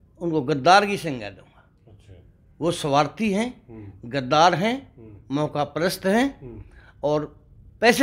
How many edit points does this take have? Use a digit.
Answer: 0